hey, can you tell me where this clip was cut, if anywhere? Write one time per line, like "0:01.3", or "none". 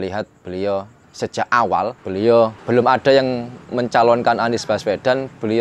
0:02.0
0:02.6
0:03.5